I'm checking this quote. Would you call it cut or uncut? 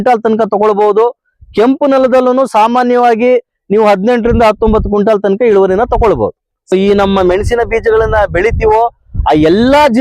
cut